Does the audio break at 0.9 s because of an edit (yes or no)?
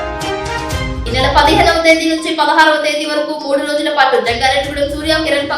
yes